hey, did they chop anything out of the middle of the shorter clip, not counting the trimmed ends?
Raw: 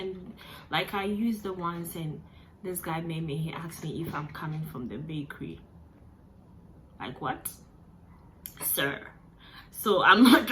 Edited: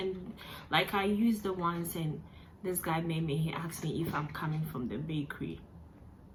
no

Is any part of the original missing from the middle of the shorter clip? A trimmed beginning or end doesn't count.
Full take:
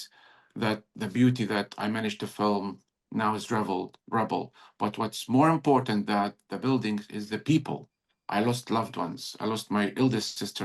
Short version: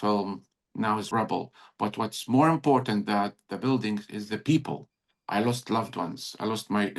yes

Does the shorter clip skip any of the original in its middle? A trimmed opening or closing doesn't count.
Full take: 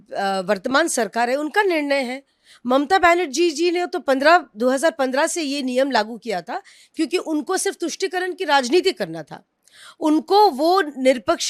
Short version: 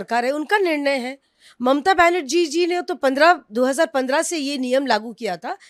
no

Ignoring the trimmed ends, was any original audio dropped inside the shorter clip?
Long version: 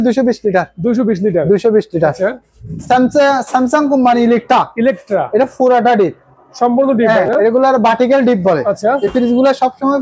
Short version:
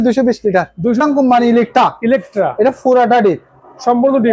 yes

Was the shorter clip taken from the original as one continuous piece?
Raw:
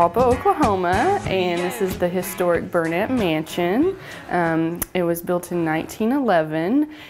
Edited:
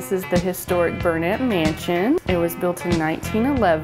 no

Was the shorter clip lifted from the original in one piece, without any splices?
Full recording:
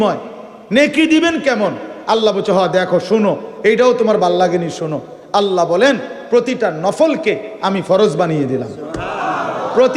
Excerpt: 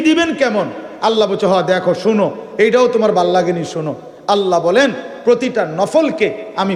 yes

